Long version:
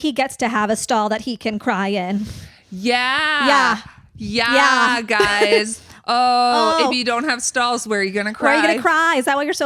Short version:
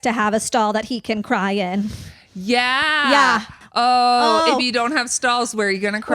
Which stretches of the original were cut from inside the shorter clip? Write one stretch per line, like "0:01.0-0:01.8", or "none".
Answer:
0:03.9-0:05.9